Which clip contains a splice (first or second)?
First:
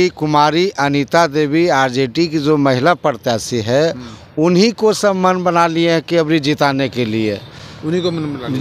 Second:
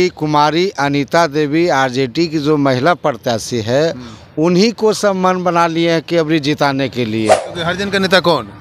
second